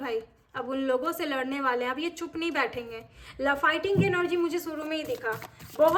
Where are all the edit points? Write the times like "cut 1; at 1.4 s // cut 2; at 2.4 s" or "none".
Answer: none